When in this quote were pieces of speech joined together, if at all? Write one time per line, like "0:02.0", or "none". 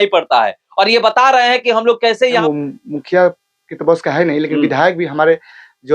0:02.4